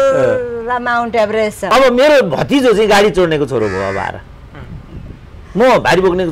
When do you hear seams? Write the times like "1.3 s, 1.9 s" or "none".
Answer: 1.7 s